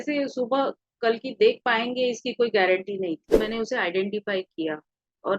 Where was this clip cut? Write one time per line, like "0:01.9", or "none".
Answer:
0:03.4

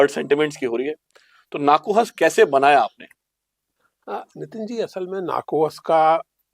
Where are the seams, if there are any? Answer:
none

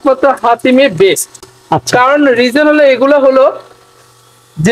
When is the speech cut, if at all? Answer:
none

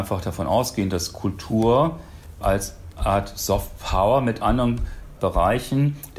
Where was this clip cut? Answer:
none

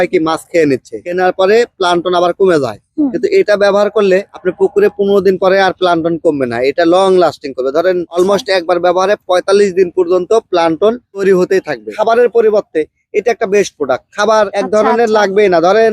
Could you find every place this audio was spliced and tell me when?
0:01.1
0:11.9

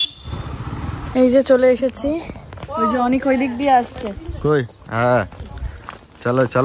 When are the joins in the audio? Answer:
0:01.1

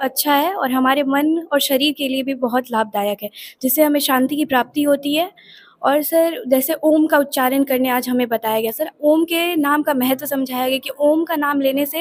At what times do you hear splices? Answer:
none

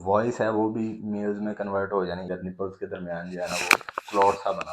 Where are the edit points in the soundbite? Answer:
0:02.3

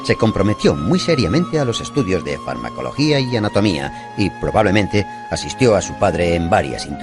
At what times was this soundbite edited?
0:01.3

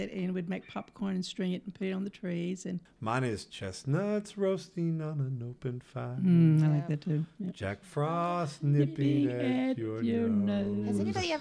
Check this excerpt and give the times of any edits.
0:02.9

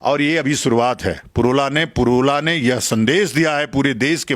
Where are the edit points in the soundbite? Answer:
none

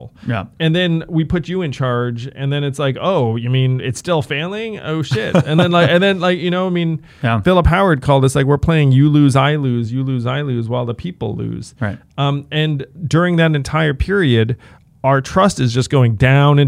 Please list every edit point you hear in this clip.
none

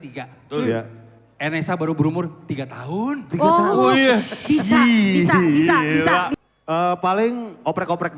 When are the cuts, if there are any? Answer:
0:06.3

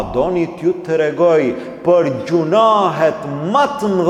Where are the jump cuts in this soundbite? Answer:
none

